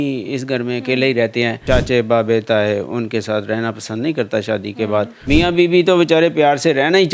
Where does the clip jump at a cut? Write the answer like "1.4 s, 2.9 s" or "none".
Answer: 1.6 s, 5.2 s